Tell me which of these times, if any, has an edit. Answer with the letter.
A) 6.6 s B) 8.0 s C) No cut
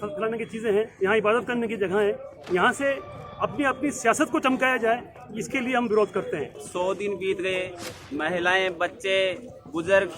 A